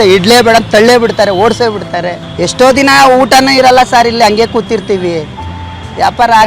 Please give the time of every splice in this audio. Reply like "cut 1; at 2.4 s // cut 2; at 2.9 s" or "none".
cut 1; at 2.2 s